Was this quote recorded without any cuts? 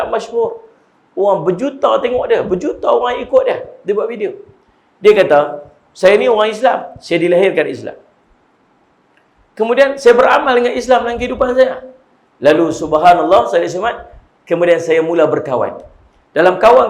yes; 0 cuts

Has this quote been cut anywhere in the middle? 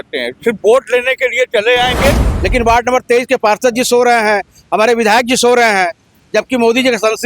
yes; 1 cut; at 2.3 s

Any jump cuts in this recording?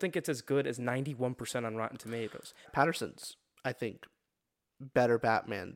yes; 1 cut; at 2.7 s

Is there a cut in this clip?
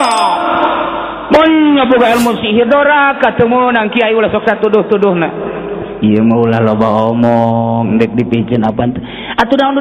no; 0 cuts

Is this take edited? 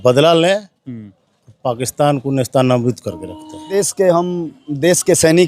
yes; 1 cut; at 3.8 s

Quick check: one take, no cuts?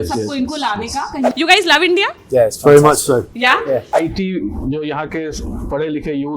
no; 2 cuts; at 1.3 s, 3.9 s

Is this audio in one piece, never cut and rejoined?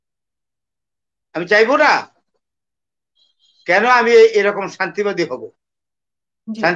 yes; 0 cuts

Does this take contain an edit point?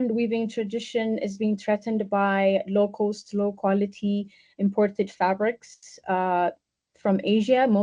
no; 0 cuts

